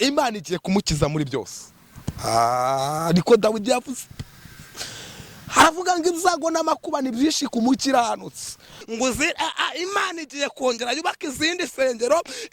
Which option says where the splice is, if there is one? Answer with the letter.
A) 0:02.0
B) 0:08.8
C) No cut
B